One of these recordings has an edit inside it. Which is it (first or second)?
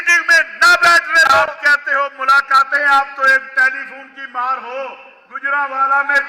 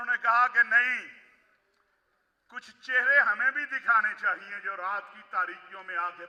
first